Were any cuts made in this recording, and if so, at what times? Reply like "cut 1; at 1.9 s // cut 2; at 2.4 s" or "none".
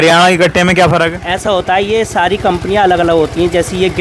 none